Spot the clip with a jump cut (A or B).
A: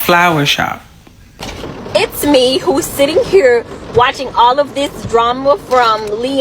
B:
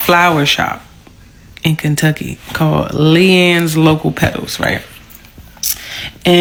A